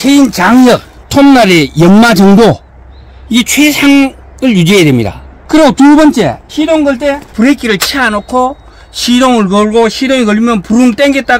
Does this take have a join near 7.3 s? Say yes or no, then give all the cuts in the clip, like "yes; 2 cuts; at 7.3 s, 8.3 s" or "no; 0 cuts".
yes; 3 cuts; at 1.0 s, 6.4 s, 7.3 s